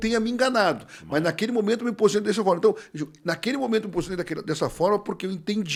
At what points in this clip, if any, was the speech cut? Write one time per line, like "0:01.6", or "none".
none